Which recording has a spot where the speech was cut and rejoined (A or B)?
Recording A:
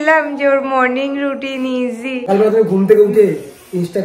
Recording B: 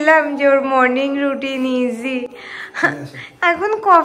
A